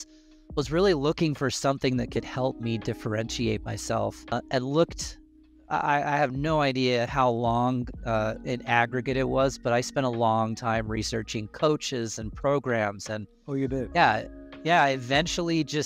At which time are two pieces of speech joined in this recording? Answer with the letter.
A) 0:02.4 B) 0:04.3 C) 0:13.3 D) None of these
D